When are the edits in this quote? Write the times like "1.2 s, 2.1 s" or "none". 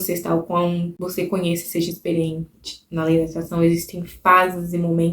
1.0 s